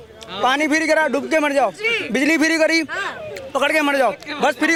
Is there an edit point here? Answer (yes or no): no